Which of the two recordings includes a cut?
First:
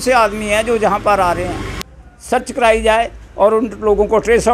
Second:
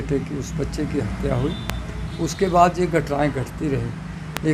first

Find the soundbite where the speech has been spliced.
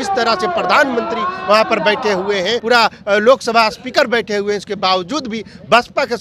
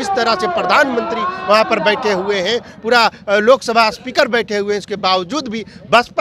first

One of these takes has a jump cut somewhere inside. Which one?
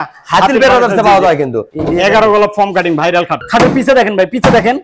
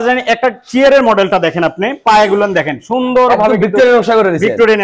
first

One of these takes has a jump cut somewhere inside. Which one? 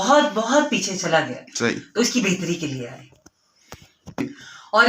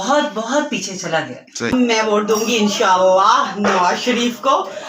second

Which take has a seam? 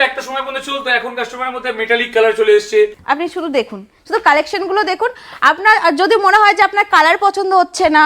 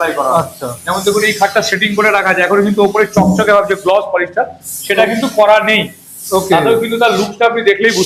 first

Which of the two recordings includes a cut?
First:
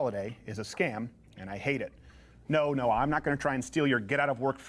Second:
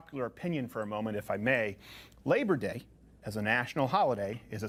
first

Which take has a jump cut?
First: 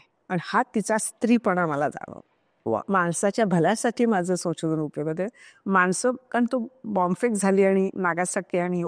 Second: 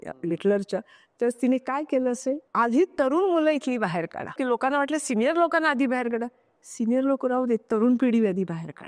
second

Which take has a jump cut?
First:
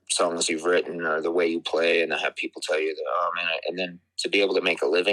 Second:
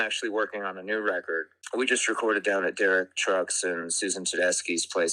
second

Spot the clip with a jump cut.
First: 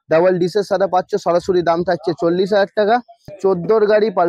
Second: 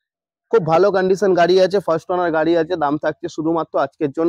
first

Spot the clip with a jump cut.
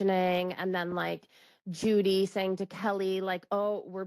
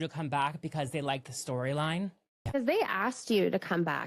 second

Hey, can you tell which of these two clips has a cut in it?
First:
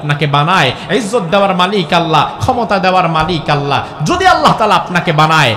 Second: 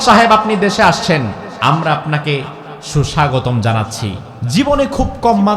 second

